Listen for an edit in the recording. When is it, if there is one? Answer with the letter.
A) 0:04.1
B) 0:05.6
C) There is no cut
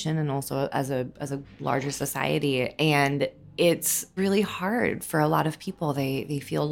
A